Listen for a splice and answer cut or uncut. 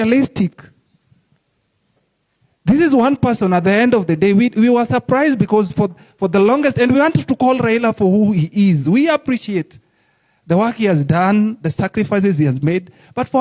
uncut